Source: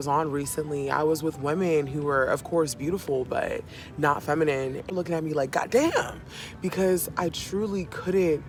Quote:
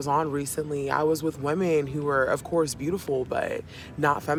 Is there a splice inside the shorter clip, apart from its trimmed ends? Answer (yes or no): no